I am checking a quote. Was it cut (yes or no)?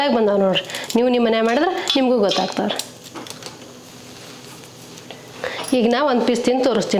no